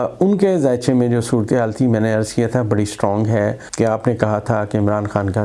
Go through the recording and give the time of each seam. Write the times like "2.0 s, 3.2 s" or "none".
3.6 s